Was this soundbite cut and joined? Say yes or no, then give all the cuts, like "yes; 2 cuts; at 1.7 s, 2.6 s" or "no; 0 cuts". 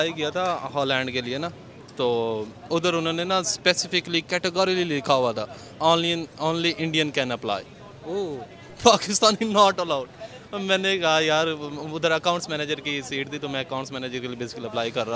no; 0 cuts